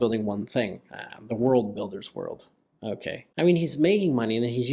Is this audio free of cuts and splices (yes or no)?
no